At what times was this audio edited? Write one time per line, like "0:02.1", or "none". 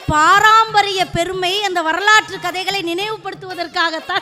none